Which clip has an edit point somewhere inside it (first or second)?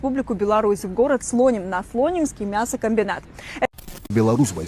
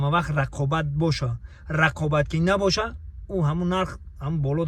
first